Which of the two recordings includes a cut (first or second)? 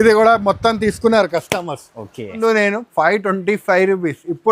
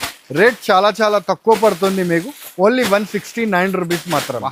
first